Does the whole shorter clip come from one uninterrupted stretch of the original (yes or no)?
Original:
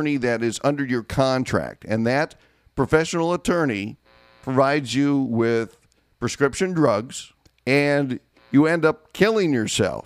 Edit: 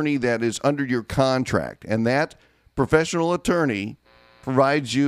yes